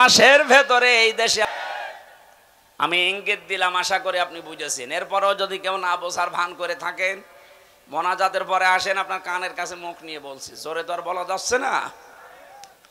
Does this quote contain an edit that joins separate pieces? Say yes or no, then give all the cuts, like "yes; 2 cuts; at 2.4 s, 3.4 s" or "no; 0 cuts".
yes; 1 cut; at 1.4 s